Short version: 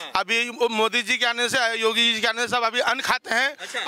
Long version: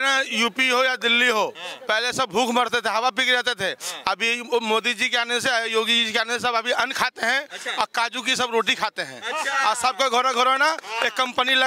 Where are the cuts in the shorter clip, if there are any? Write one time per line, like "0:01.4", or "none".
none